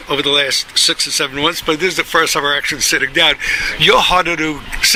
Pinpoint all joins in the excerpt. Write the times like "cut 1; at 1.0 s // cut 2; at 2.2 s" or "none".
none